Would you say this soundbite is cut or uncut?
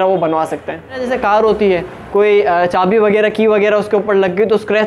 cut